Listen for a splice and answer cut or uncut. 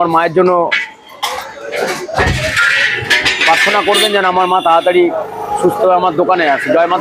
uncut